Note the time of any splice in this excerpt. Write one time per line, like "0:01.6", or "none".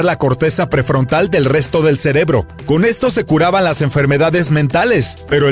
none